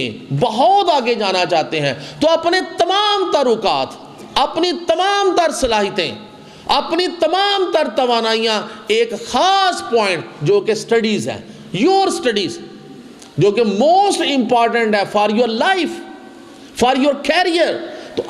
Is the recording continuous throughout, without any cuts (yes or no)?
yes